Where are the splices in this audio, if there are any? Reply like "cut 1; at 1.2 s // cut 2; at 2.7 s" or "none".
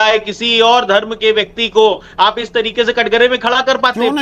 none